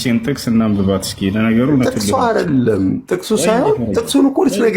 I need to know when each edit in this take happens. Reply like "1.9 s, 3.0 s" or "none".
3.0 s